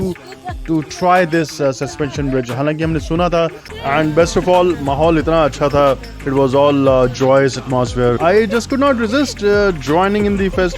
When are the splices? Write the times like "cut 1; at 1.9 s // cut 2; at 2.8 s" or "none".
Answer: cut 1; at 3.7 s